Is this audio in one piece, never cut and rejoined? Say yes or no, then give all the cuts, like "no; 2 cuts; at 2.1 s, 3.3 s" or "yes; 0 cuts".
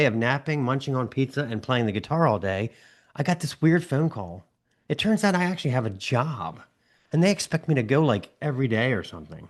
yes; 0 cuts